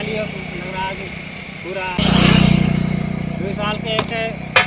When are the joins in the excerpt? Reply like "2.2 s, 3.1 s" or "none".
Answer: 2.0 s